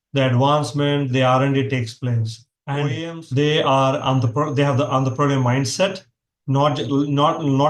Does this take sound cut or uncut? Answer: cut